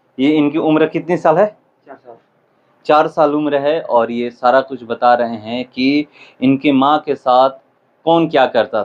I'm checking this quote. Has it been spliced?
no; 0 cuts

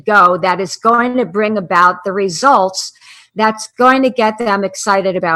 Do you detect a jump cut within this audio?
no; 0 cuts

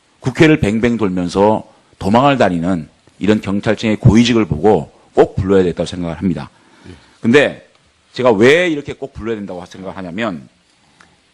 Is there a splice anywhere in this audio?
no; 0 cuts

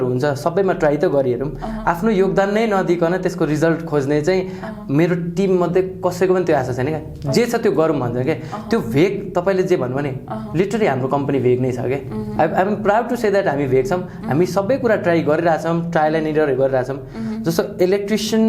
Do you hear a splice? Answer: no; 0 cuts

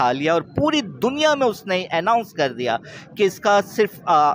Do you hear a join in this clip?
no; 0 cuts

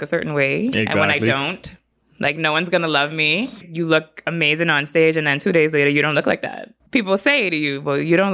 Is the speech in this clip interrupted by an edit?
yes; 2 cuts; at 3.6 s, 6.7 s

